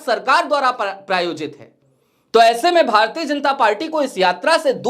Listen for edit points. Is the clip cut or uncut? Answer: uncut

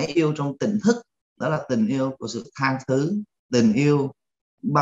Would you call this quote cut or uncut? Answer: uncut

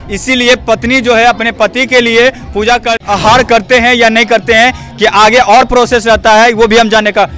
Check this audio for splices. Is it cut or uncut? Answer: cut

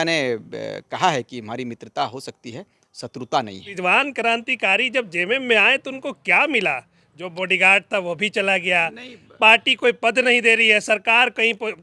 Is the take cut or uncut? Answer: cut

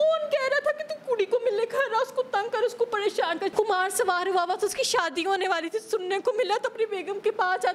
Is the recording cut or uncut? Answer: cut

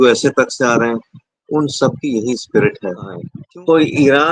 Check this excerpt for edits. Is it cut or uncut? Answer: cut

